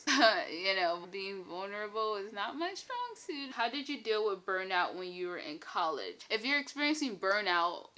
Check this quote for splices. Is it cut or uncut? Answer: cut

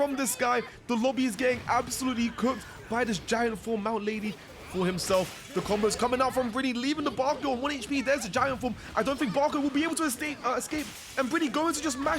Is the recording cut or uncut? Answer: cut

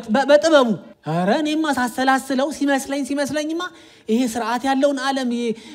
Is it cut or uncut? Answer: cut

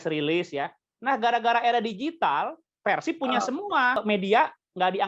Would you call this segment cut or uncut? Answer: cut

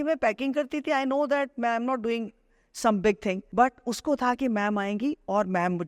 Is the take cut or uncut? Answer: cut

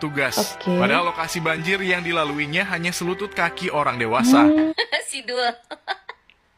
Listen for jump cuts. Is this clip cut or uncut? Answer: cut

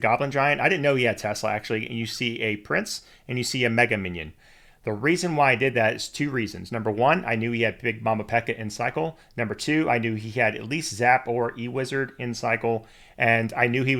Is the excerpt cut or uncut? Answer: uncut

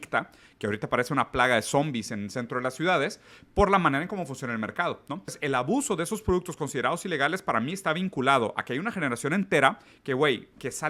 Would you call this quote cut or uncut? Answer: cut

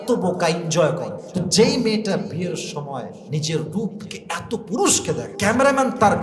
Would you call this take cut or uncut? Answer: cut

